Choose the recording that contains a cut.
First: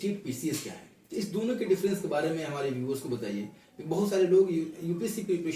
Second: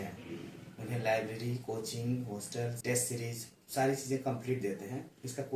second; 1 cut; at 2.8 s

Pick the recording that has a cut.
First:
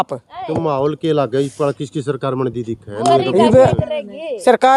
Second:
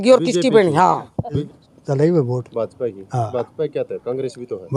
second; 1 cut; at 1.4 s

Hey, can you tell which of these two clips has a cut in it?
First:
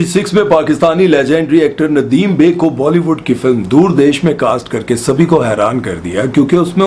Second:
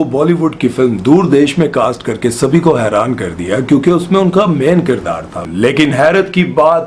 second; 1 cut; at 5.3 s

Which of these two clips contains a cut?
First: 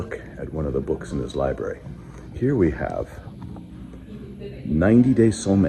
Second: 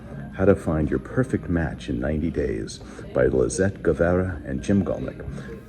second; 1 cut; at 4.6 s

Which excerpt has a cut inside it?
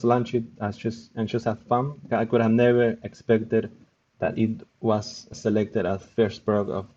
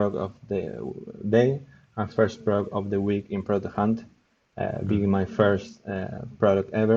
first; 2 cuts; at 2.0 s, 5.3 s

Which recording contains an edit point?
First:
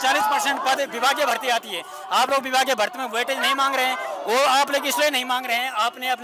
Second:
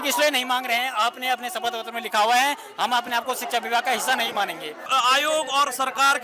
second; 1 cut; at 4.9 s

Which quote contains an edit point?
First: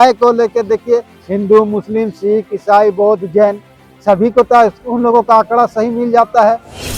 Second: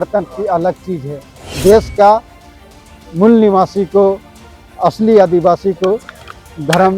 second; 1 cut; at 1.4 s

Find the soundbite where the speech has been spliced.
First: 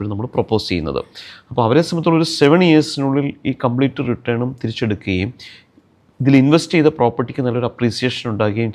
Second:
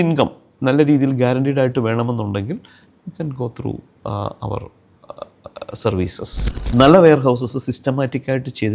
second; 1 cut; at 6.5 s

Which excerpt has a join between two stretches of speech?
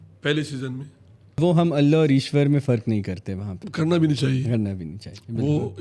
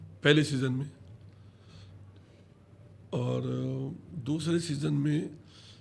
first; 1 cut; at 1.4 s

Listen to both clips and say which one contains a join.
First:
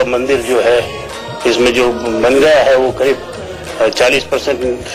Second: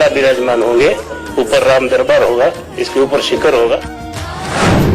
second; 1 cut; at 4.0 s

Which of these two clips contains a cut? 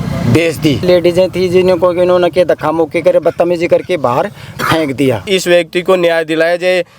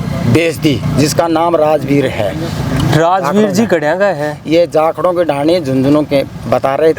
first; 2 cuts; at 0.8 s, 5.2 s

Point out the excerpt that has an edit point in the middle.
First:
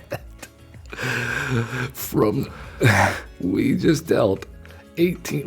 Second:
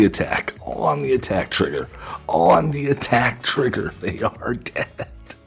first; 1 cut; at 2.6 s

